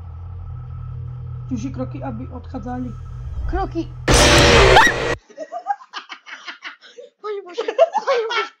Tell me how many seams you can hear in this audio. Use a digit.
1